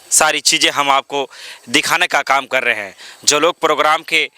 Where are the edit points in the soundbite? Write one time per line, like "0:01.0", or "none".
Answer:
none